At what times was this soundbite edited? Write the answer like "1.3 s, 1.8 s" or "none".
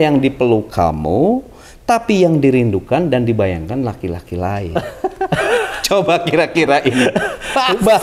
5.3 s